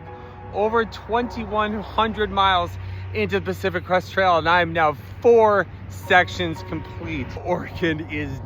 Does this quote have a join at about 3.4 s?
no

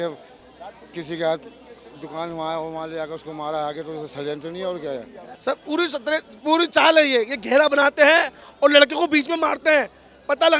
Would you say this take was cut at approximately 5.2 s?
yes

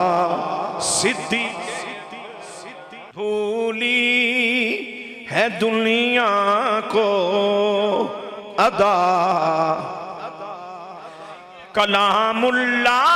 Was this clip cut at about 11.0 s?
no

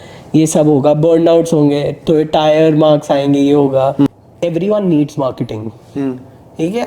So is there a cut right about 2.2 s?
no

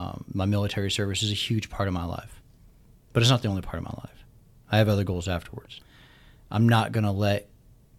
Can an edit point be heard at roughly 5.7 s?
yes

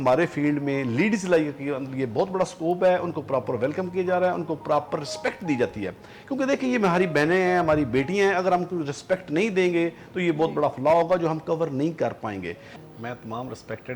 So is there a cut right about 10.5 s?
no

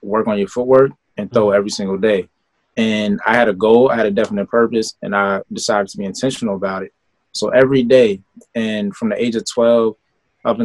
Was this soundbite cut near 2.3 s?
no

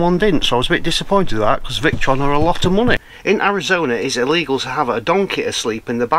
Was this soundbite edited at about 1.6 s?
no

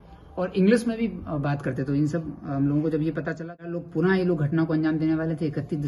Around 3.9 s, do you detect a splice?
yes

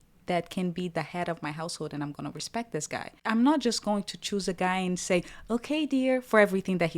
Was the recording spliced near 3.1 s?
yes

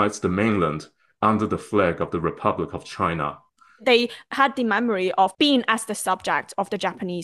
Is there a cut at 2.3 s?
no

